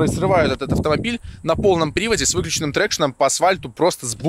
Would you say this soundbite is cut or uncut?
uncut